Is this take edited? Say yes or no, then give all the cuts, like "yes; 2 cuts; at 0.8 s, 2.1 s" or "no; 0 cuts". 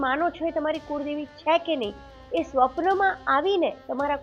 no; 0 cuts